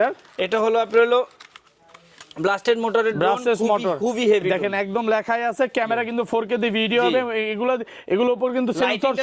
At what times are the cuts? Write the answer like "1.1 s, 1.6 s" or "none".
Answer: none